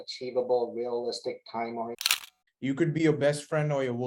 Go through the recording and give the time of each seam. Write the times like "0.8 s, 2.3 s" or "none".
2.1 s